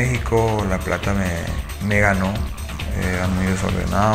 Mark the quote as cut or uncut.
cut